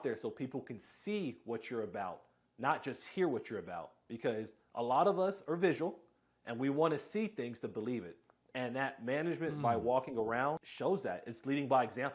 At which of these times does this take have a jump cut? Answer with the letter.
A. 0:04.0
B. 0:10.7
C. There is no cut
B